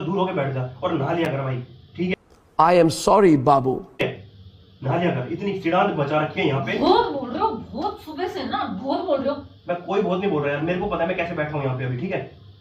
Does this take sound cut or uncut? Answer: uncut